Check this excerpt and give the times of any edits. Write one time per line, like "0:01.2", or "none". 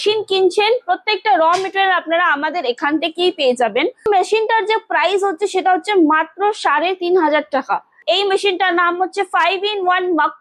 0:04.1
0:08.0